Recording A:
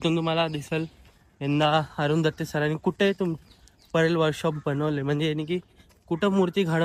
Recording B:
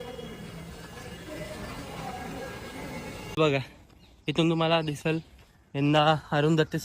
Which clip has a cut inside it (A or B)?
B